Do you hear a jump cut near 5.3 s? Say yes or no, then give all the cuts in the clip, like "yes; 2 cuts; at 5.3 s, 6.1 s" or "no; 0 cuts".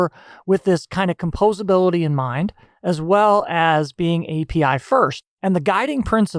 yes; 1 cut; at 5.3 s